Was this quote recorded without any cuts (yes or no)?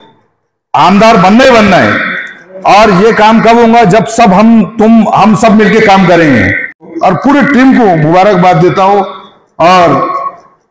no